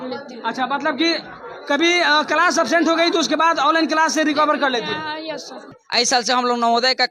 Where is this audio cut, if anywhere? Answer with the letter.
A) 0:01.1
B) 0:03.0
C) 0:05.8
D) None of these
C